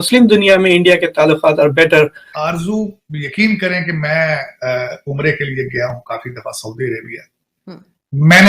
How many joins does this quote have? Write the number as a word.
one